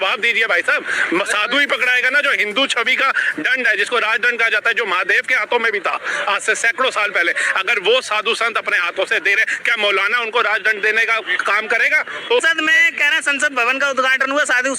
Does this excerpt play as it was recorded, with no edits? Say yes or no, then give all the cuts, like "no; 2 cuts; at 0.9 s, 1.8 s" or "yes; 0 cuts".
no; 1 cut; at 12.4 s